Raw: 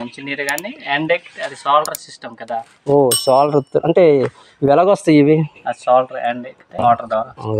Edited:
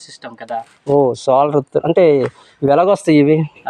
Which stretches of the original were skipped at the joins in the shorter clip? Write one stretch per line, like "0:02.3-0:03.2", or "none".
none